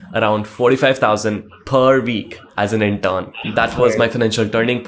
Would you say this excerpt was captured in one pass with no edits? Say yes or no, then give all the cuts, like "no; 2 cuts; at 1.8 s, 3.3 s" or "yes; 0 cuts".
yes; 0 cuts